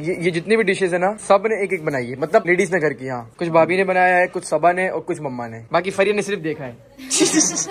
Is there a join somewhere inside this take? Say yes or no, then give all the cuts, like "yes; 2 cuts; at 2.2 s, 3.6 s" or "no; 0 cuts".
no; 0 cuts